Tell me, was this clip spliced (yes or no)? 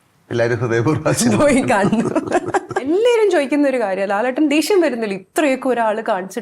yes